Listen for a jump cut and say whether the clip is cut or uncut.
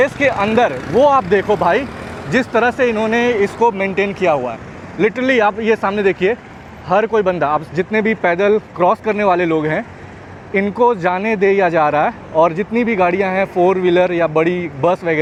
uncut